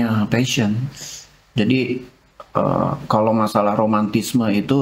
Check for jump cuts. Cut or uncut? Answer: uncut